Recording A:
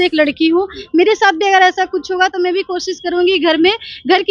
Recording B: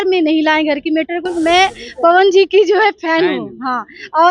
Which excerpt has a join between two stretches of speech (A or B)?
B